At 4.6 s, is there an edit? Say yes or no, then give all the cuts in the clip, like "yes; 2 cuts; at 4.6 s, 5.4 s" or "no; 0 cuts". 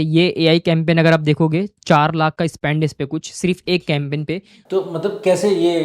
yes; 1 cut; at 4.6 s